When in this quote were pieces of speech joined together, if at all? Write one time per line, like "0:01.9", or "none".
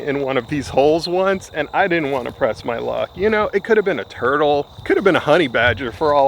0:04.7